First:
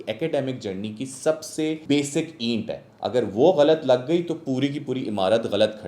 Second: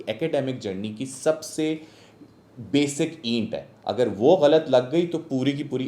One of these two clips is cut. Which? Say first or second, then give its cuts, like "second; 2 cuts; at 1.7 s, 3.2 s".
first; 1 cut; at 1.8 s